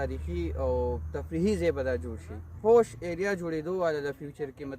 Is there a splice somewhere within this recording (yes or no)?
yes